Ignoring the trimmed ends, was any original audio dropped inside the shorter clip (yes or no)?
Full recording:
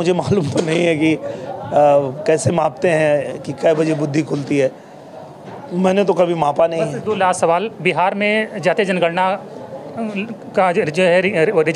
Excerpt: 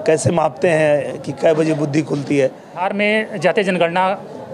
yes